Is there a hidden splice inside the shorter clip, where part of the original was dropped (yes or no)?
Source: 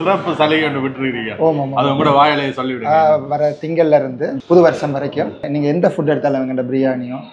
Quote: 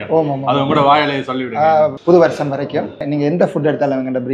yes